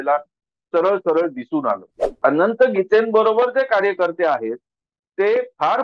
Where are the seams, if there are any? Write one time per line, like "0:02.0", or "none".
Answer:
0:02.2